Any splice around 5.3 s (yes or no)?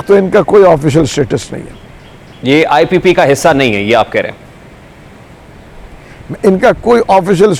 no